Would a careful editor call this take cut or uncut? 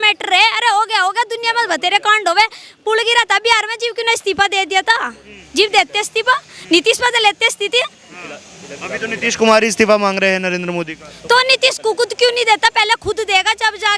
uncut